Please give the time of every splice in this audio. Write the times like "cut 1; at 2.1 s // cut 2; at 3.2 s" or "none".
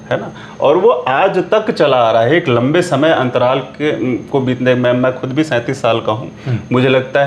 none